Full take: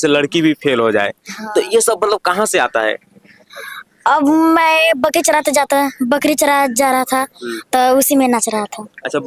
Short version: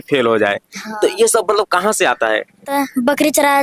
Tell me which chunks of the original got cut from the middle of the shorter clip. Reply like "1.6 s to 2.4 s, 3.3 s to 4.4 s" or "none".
3.2 s to 5.7 s